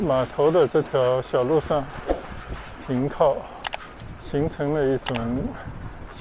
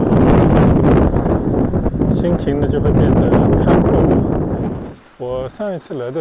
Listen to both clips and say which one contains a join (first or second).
second